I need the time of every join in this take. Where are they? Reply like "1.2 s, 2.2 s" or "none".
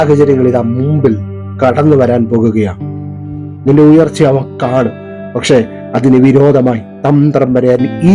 3.2 s